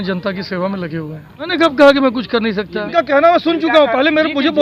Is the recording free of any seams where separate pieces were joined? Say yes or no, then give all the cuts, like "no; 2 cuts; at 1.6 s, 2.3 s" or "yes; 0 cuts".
no; 2 cuts; at 1.5 s, 2.9 s